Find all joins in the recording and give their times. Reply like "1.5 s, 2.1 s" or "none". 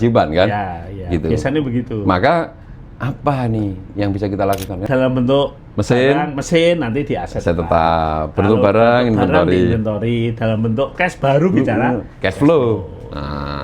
4.9 s